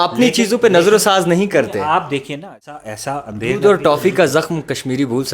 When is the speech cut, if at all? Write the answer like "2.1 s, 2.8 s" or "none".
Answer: 2.9 s